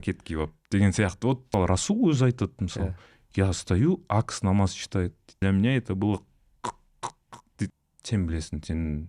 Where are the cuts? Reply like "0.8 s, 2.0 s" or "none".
1.5 s, 5.4 s, 7.7 s